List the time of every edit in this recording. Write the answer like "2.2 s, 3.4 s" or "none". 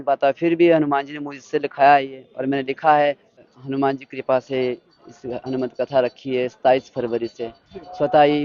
3.5 s